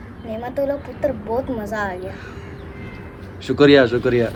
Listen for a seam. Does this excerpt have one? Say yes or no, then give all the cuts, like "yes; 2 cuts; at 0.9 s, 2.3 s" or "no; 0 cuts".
no; 0 cuts